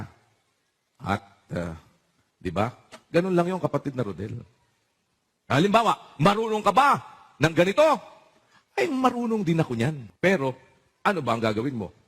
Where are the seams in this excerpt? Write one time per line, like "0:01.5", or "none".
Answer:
0:10.1

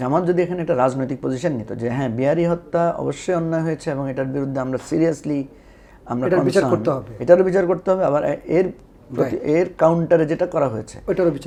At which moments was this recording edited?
none

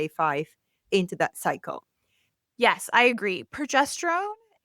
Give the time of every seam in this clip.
0:02.2

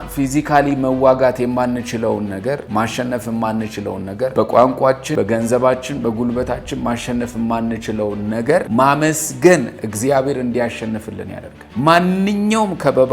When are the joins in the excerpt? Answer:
0:02.6
0:04.3
0:05.1
0:08.7

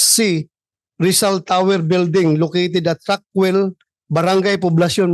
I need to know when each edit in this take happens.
none

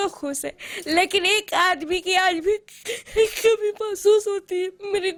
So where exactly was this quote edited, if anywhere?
none

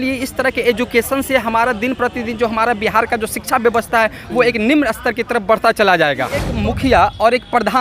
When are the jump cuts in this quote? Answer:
0:06.5

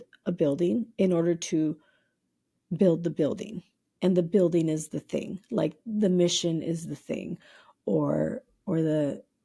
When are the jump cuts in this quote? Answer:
none

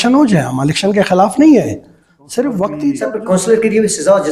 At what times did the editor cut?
0:03.0

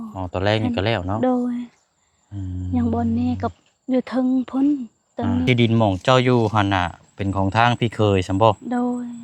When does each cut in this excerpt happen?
0:05.4

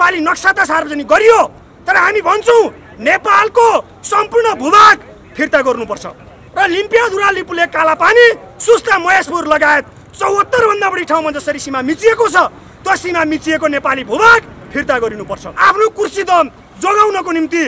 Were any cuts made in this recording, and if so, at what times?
0:15.5

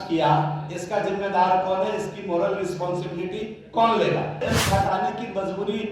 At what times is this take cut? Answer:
0:04.4

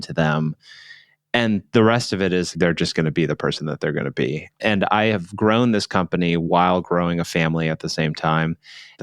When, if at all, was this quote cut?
0:02.5
0:04.4

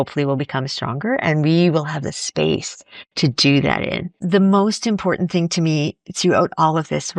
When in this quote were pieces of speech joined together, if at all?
0:04.2

